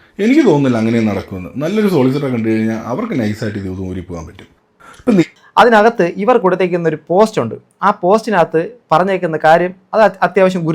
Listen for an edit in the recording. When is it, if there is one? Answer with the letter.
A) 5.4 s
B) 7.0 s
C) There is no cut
A